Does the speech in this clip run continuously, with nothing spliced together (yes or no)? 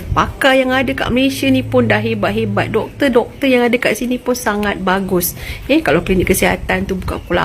yes